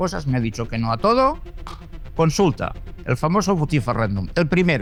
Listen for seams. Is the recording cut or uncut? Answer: uncut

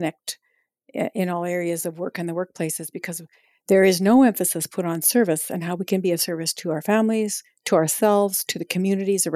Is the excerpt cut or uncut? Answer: uncut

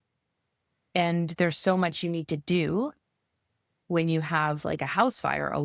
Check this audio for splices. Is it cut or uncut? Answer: uncut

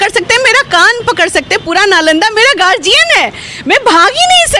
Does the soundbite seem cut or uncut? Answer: uncut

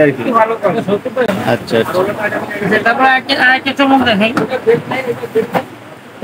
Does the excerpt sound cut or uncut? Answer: uncut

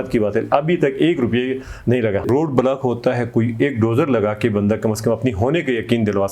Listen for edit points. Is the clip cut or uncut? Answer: cut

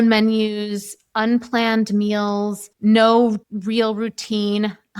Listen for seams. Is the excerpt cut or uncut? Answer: cut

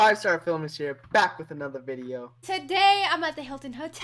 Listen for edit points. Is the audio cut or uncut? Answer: uncut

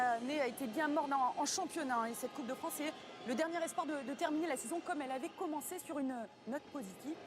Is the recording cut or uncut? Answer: cut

